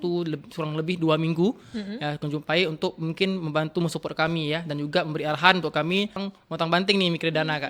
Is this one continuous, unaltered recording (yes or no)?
no